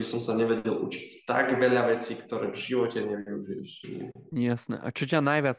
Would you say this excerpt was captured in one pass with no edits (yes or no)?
yes